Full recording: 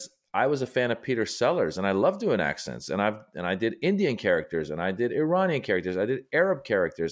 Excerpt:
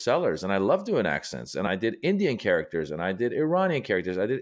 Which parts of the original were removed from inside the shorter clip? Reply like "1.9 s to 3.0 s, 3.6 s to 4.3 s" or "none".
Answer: 3.0 s to 3.4 s

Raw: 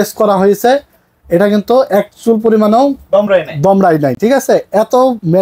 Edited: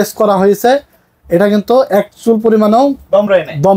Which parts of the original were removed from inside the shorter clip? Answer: none

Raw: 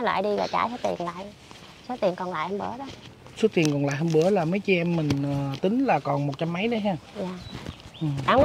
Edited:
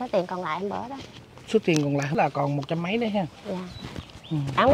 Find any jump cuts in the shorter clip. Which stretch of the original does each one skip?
4.0 s to 5.9 s

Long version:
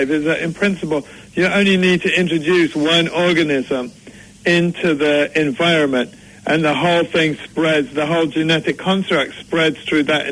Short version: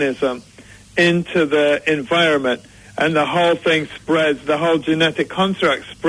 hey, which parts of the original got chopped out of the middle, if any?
none

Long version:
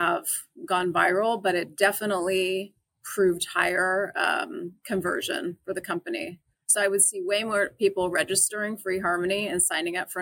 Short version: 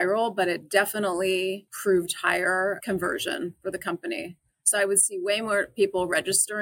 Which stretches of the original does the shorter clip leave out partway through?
2.7 s to 3.0 s, 4.1 s to 4.8 s

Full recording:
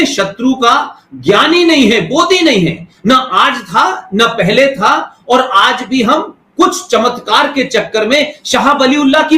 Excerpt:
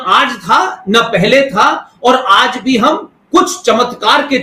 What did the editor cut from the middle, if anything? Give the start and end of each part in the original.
none

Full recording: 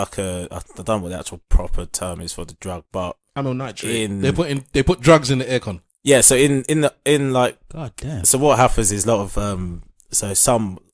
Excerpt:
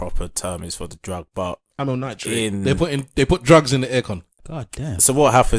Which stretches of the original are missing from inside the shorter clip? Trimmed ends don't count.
5.9 s to 7.6 s

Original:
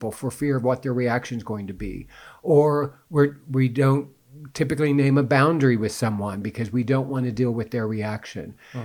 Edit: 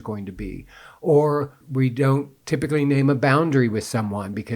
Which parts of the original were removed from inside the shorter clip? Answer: 3.0 s to 3.4 s, 4.1 s to 4.4 s

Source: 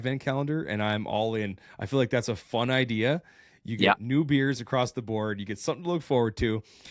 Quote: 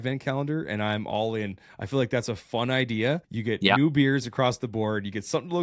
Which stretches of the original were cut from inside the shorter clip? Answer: 3.7 s to 4.0 s

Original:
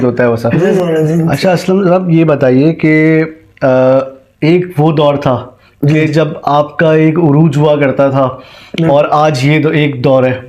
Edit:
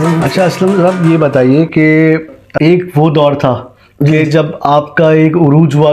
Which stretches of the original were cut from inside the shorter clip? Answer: 3.5 s to 4.2 s

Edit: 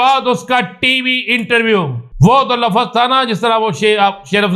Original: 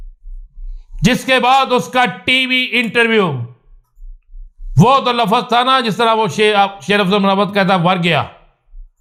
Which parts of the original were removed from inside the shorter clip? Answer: 3.5 s to 4.6 s

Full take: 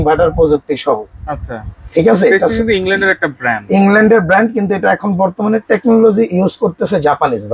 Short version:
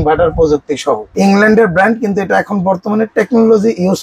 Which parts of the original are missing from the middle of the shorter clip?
1.1 s to 3.6 s

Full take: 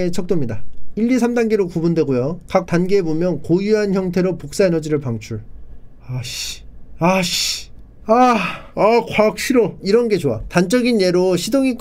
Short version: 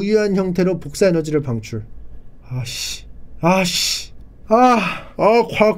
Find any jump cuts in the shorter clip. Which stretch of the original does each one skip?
none

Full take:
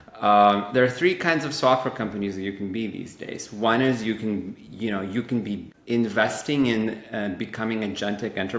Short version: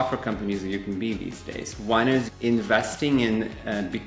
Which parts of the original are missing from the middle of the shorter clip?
4.0 s to 5.7 s

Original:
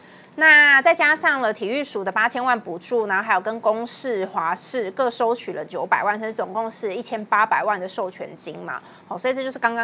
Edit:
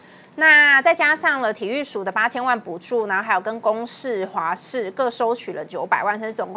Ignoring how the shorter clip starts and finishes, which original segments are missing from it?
none

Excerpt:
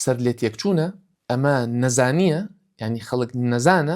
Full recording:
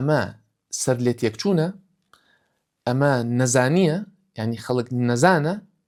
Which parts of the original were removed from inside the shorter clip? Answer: 1.9 s to 2.6 s

